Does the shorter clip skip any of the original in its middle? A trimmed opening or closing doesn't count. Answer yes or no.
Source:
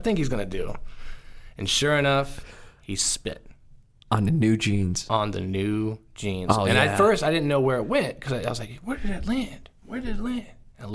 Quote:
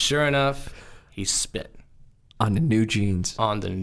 no